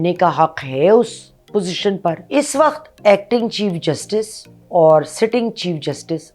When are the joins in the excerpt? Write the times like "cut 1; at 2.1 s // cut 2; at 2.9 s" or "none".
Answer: cut 1; at 2.2 s